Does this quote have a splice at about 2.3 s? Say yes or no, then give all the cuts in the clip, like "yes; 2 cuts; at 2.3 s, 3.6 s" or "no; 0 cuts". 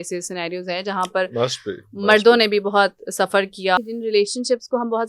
no; 1 cut; at 3.8 s